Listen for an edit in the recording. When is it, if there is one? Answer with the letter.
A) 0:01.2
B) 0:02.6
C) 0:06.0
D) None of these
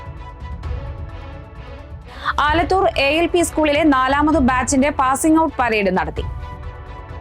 A